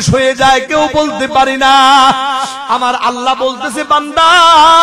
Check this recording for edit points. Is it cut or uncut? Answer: cut